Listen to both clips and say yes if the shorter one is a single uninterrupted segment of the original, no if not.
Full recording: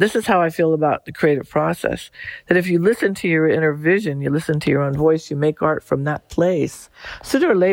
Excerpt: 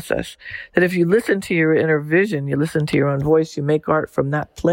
yes